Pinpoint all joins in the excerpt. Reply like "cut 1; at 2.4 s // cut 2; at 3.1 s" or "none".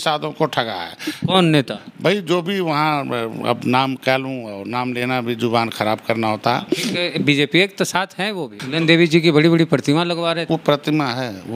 cut 1; at 8.6 s // cut 2; at 10.4 s